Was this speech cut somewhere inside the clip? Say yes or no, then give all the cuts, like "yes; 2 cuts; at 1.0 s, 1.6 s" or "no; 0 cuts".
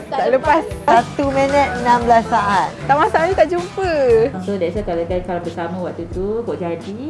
yes; 2 cuts; at 0.8 s, 4.3 s